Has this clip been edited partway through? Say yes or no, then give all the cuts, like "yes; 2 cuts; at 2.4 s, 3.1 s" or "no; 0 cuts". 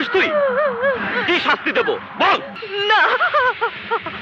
yes; 1 cut; at 2.6 s